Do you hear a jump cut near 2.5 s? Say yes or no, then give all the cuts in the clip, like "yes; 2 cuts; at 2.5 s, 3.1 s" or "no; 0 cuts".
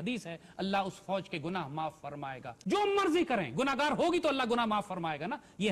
yes; 1 cut; at 2.5 s